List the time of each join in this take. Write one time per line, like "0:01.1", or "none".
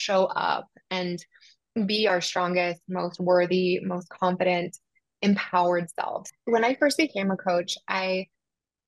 0:06.3